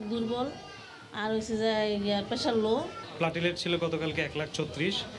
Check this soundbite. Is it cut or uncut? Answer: cut